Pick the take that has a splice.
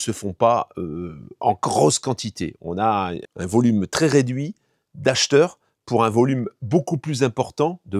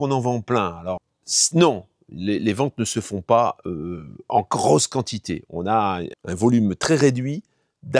second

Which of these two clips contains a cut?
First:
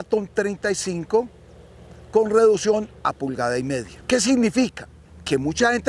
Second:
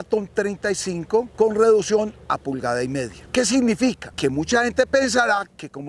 second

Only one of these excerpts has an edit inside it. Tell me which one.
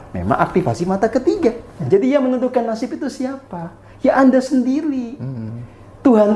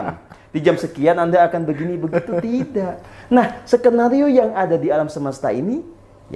first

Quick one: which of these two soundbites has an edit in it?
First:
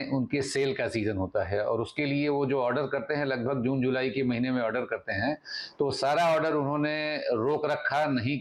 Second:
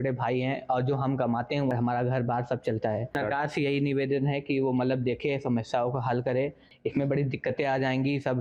second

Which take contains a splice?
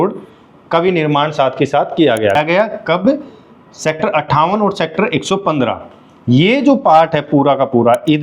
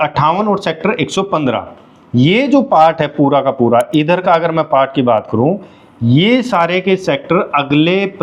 first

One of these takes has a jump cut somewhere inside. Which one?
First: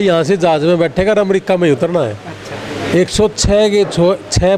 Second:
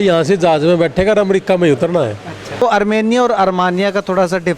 second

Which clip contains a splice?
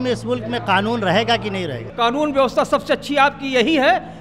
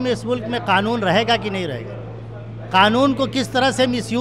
first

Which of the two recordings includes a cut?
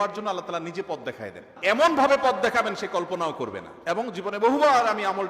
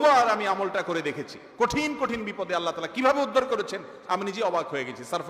first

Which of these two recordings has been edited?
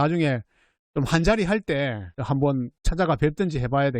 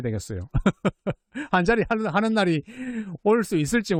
first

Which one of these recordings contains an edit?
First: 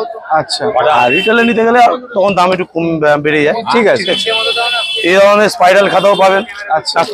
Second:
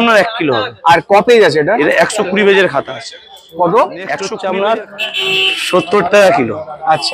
second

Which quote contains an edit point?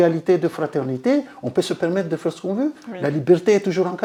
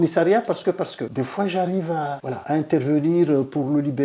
second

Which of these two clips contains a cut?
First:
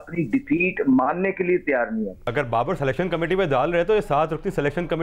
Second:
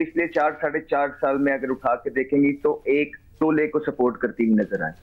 first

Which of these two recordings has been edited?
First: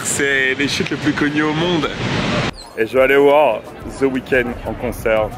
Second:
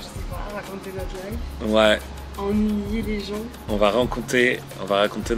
first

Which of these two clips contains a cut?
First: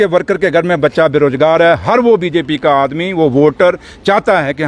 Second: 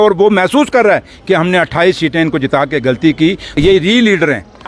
second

